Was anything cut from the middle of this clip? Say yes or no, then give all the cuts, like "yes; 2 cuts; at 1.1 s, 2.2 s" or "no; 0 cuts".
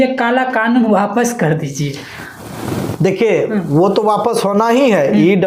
no; 0 cuts